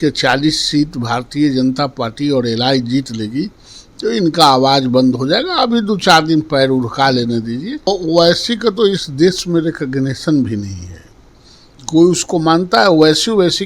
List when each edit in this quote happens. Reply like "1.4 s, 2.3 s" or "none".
7.9 s

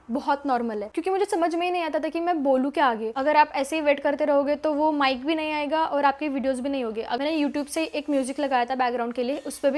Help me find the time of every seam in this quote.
0.9 s, 3.1 s, 7.2 s

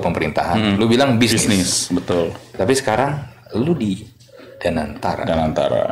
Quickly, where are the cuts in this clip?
none

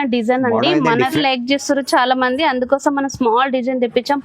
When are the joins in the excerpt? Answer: 1.2 s

